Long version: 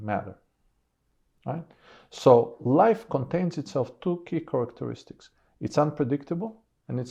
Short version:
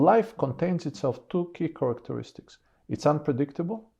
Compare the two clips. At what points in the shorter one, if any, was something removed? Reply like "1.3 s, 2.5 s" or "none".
none